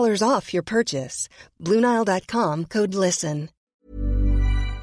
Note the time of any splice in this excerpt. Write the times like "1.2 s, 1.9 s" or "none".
3.7 s